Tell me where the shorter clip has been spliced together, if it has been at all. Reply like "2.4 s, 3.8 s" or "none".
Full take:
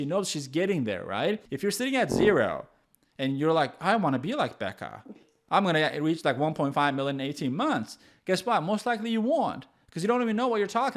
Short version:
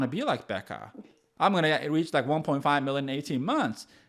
none